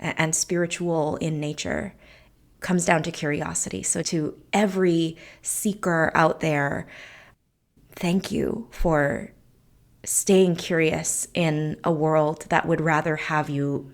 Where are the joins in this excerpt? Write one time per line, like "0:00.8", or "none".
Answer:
0:04.1